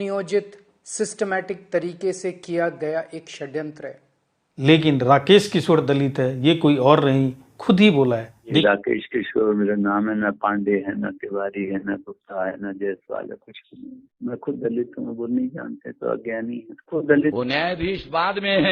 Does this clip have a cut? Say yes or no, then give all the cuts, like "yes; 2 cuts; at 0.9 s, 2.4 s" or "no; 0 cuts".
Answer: yes; 3 cuts; at 4.4 s, 8.6 s, 17.3 s